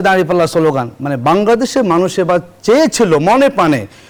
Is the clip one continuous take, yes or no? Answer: yes